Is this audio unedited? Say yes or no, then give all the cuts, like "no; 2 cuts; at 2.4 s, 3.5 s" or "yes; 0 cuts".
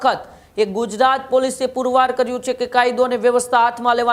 yes; 0 cuts